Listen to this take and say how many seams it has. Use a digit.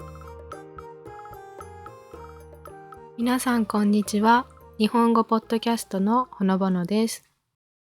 1